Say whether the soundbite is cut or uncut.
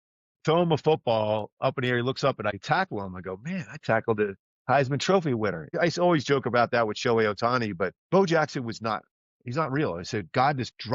cut